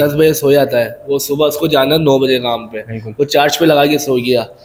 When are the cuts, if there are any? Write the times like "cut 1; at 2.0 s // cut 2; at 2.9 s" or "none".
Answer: none

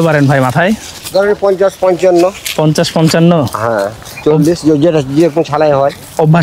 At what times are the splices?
none

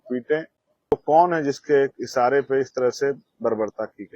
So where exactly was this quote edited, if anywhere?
cut 1; at 0.9 s

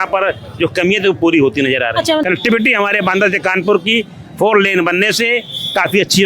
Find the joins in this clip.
cut 1; at 2.2 s

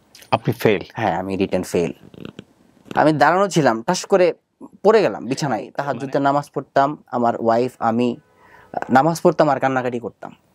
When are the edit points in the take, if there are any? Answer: cut 1; at 5.7 s

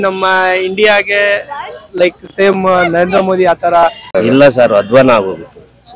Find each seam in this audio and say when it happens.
cut 1; at 4.1 s

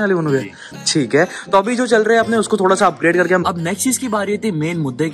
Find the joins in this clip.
cut 1; at 3.4 s

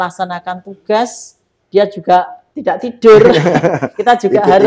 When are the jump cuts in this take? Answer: cut 1; at 2.4 s

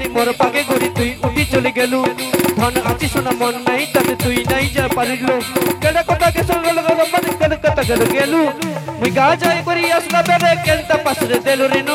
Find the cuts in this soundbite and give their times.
none

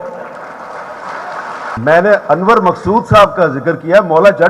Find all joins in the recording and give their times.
cut 1; at 1.8 s

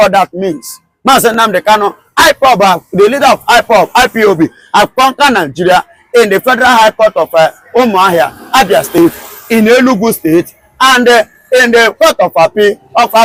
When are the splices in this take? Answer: none

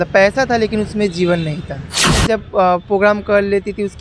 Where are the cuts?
cut 1; at 2.2 s

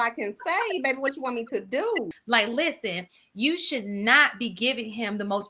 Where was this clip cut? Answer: cut 1; at 2.2 s

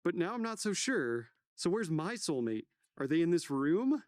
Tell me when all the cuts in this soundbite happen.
cut 1; at 1.4 s

